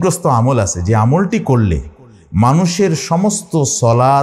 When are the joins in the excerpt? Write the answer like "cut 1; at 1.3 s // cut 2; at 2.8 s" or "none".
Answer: none